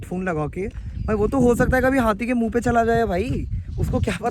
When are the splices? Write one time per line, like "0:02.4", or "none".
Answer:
none